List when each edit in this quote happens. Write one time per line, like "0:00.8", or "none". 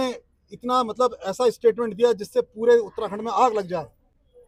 none